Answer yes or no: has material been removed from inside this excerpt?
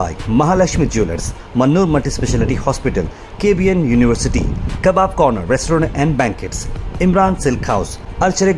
no